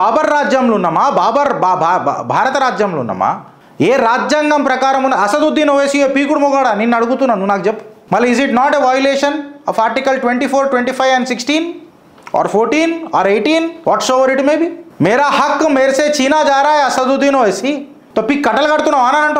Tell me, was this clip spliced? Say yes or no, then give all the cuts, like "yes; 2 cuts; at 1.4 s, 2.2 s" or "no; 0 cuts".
yes; 3 cuts; at 7.9 s, 13.7 s, 14.8 s